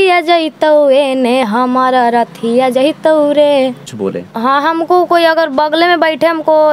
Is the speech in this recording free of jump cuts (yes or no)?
no